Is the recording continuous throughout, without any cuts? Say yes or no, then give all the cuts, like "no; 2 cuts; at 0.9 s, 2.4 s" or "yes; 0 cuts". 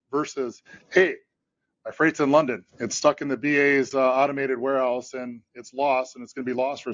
yes; 0 cuts